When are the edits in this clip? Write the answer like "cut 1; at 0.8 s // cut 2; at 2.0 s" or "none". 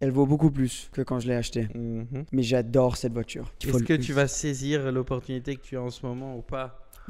cut 1; at 0.8 s // cut 2; at 2.2 s // cut 3; at 3.5 s